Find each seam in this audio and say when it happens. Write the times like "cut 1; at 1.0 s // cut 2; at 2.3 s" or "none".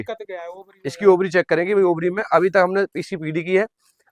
none